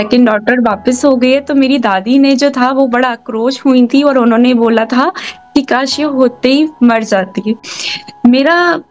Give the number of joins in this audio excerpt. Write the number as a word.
one